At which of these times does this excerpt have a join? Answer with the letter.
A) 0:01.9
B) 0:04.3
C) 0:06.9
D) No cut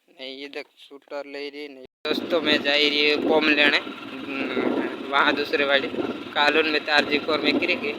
A